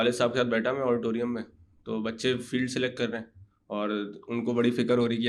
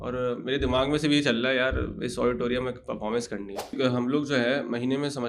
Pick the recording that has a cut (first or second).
second